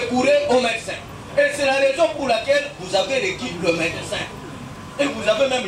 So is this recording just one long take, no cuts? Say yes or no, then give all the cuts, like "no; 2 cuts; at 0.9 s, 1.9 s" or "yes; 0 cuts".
yes; 0 cuts